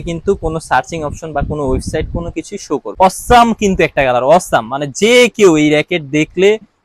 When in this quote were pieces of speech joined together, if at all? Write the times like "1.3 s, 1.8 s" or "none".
2.9 s